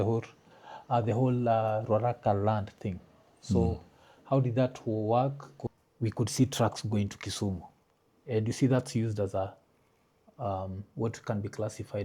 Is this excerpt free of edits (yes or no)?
no